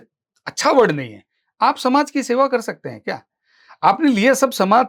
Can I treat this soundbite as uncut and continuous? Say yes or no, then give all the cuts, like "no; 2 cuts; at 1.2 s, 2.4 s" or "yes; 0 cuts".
yes; 0 cuts